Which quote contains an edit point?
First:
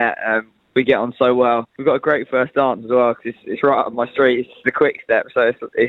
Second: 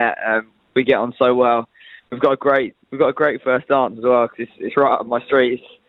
first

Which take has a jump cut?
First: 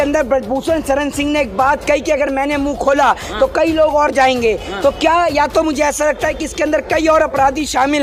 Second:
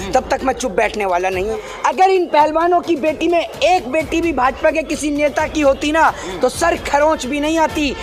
second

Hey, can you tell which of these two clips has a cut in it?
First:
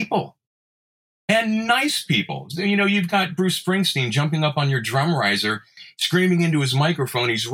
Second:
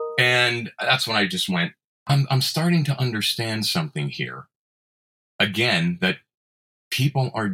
second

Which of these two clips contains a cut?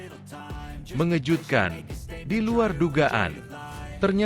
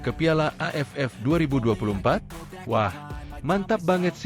first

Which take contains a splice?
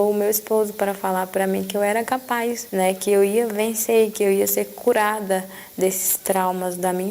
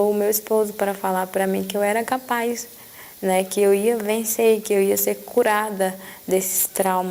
first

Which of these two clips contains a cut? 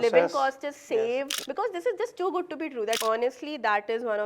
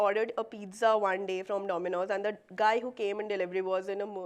first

